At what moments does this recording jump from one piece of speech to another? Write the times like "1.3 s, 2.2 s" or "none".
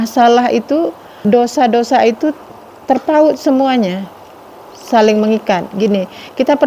1.1 s

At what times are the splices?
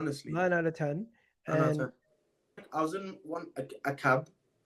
2.7 s

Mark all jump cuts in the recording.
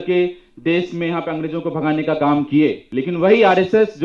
2.9 s

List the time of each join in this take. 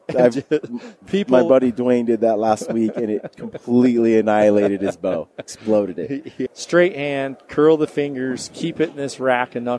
6.5 s

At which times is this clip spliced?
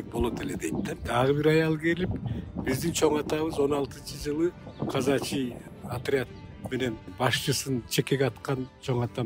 0.9 s, 4.7 s, 5.7 s, 7.1 s

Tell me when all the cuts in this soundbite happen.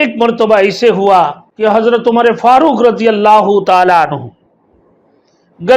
1.4 s

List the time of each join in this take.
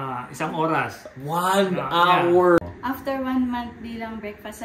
2.6 s

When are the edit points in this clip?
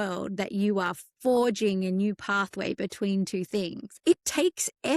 3.9 s

